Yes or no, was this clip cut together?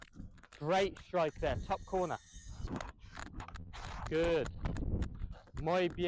yes